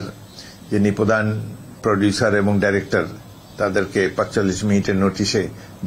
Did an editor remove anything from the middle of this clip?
no; 0 cuts

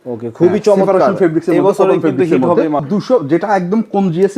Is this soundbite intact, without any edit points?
no; 1 cut; at 2.8 s

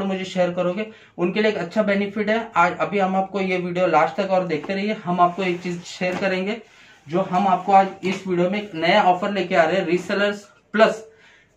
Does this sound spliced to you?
no; 0 cuts

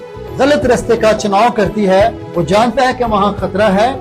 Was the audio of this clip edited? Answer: no; 0 cuts

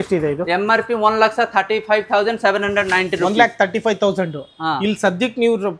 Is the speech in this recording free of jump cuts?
yes; 0 cuts

